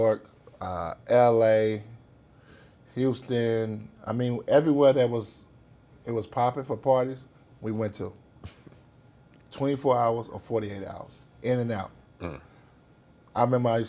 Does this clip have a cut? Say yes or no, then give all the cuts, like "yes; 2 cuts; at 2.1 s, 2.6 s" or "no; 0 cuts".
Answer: no; 0 cuts